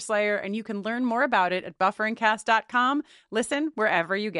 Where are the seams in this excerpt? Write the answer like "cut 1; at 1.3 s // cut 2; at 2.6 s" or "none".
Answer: none